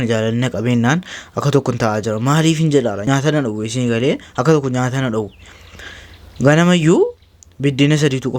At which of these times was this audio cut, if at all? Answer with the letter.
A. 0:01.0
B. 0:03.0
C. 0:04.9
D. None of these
B